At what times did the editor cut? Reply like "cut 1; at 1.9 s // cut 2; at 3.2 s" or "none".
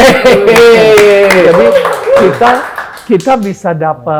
none